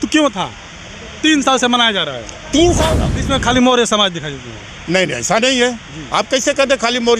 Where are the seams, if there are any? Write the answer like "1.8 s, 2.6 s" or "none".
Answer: 2.8 s